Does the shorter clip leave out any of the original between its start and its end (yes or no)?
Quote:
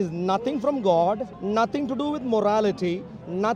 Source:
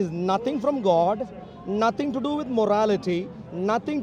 yes